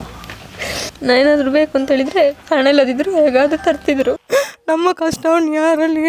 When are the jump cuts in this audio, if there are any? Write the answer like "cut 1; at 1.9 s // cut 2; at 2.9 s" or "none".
cut 1; at 0.9 s // cut 2; at 4.2 s